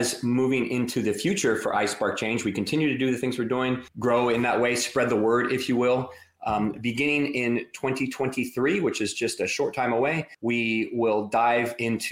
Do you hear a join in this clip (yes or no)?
yes